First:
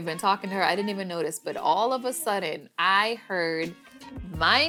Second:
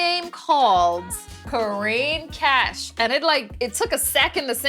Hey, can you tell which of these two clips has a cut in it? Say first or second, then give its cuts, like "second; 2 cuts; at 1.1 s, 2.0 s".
second; 1 cut; at 1.4 s